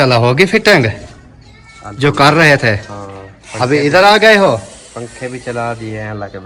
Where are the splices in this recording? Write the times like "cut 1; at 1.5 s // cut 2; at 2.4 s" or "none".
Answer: none